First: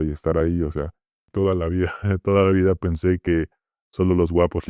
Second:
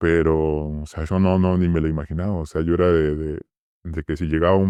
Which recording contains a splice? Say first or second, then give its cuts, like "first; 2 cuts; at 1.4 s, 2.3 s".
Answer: first; 1 cut; at 1.2 s